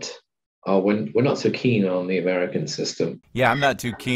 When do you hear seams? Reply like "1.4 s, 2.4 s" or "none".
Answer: 3.2 s